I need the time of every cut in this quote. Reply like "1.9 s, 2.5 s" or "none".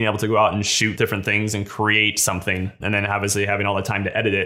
0.9 s, 2.8 s